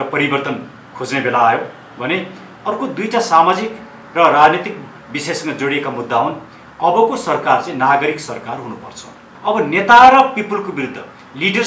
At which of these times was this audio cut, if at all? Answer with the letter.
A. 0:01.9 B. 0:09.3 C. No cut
B